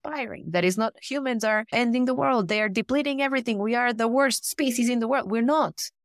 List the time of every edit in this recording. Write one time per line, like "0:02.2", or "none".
0:01.7